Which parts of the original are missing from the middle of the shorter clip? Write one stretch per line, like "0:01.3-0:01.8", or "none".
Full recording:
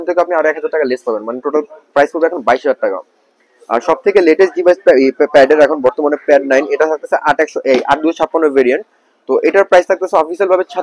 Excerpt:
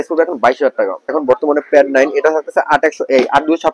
0:03.2-0:05.7